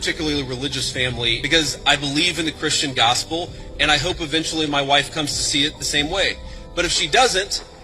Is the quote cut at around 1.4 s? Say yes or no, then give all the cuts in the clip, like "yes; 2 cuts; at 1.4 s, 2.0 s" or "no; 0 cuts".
yes; 1 cut; at 1.4 s